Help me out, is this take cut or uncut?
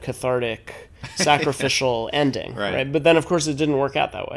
uncut